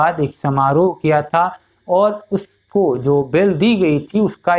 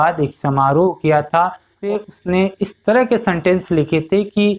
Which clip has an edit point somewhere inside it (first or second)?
second